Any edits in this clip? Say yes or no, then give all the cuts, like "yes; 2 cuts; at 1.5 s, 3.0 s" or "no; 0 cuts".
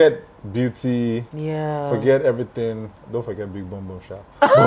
yes; 1 cut; at 1.3 s